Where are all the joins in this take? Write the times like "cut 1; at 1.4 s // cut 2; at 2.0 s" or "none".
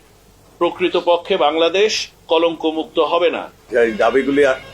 cut 1; at 3.5 s